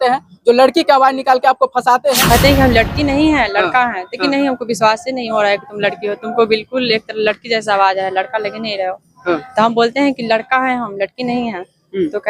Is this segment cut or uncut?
cut